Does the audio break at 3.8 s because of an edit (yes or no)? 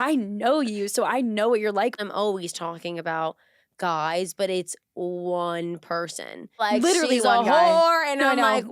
no